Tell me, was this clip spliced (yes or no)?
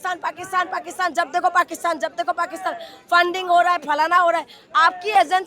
no